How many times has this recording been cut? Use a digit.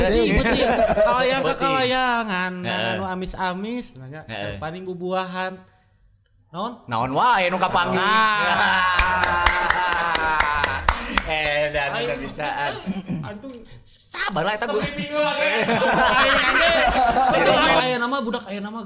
1